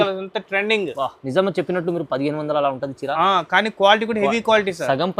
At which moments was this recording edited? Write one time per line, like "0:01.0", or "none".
none